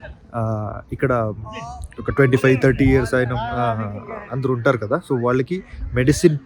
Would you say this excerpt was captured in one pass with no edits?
yes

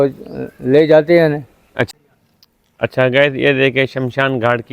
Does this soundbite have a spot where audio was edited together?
yes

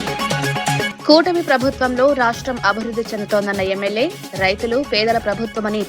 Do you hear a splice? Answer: yes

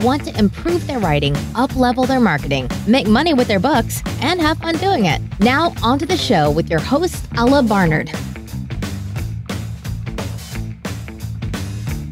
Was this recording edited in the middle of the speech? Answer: no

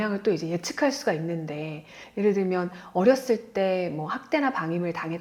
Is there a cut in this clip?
no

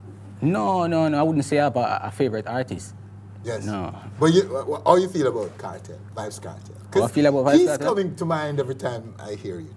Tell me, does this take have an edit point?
no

